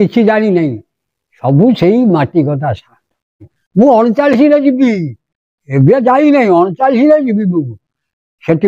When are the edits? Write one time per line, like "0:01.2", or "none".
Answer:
0:03.6